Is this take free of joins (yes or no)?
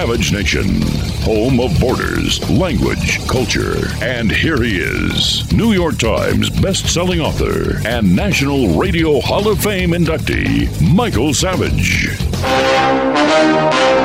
no